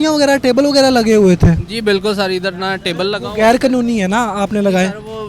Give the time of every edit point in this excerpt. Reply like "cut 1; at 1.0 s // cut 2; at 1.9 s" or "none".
none